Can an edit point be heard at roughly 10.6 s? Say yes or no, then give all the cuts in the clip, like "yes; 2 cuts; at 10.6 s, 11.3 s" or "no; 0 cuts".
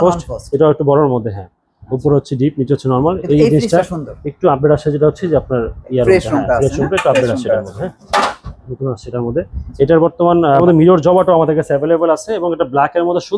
yes; 1 cut; at 10.6 s